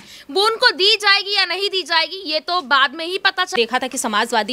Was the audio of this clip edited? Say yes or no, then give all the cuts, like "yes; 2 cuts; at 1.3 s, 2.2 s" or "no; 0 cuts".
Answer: yes; 1 cut; at 3.5 s